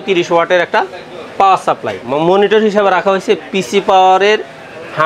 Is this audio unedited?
no; 1 cut; at 2.0 s

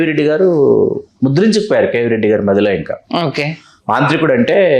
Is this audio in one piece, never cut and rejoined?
yes; 0 cuts

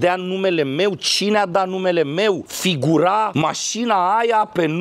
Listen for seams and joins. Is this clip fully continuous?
yes; 0 cuts

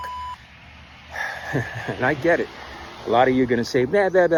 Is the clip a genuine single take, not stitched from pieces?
yes; 0 cuts

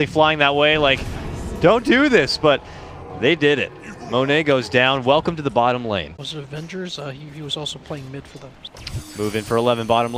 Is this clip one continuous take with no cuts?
yes; 0 cuts

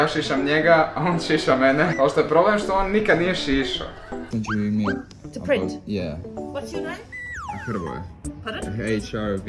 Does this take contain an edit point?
yes; 2 cuts; at 1.9 s, 4.3 s

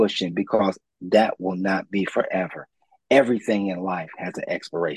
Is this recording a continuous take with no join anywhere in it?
yes; 0 cuts

